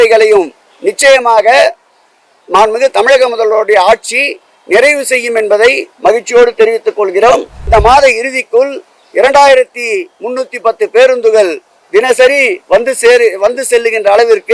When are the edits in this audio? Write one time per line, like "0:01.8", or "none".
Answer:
0:07.5